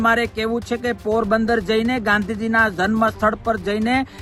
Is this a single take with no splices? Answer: yes; 0 cuts

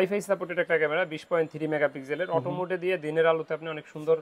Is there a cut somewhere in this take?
no; 0 cuts

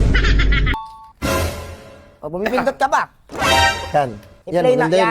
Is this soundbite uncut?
no; 2 cuts; at 0.9 s, 2.0 s

